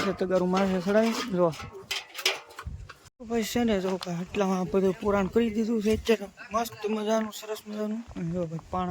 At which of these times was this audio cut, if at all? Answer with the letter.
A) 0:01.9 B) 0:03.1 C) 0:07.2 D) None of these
B